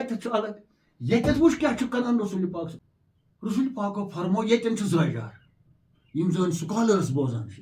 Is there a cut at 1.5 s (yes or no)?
no